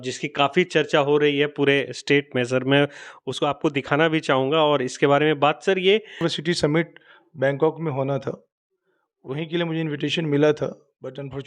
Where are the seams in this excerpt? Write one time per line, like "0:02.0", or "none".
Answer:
0:06.2